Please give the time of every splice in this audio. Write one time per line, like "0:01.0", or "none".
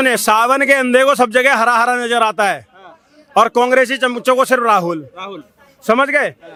none